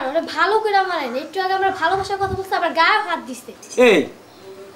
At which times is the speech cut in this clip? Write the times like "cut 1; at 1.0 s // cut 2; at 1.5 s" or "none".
cut 1; at 1.9 s

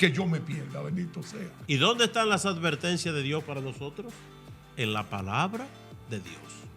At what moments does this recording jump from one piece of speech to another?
cut 1; at 1.5 s

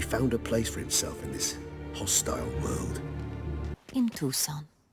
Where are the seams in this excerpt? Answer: cut 1; at 3.7 s

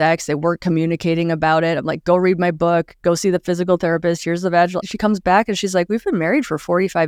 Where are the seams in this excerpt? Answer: none

